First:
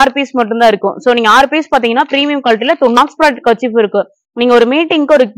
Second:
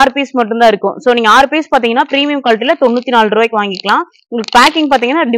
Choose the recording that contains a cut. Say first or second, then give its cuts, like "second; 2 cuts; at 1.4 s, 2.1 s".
first; 1 cut; at 3.0 s